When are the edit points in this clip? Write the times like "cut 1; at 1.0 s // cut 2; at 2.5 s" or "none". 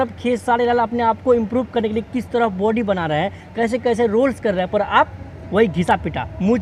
none